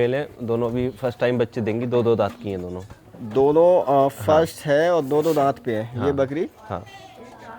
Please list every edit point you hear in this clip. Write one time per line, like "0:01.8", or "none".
none

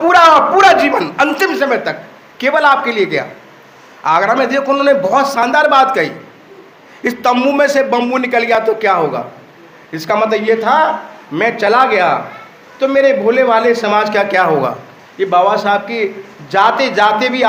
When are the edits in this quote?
none

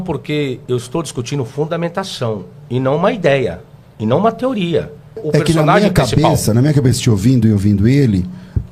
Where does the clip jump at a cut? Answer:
0:05.2

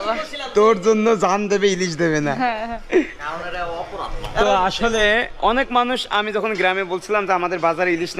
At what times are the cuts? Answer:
none

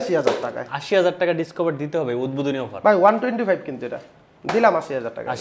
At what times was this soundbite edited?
none

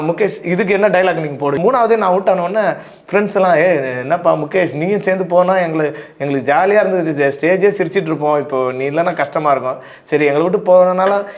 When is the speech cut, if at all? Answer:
0:01.6

